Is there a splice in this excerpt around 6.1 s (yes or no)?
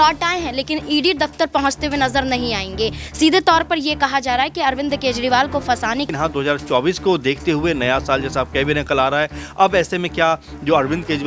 yes